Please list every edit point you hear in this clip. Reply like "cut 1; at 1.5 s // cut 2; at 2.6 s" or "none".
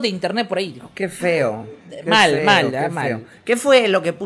none